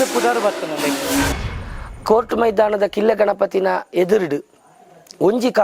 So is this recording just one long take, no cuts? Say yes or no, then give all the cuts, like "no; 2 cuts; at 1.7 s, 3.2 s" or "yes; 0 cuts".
no; 1 cut; at 1.3 s